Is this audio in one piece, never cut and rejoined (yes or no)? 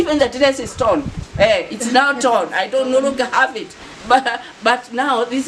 yes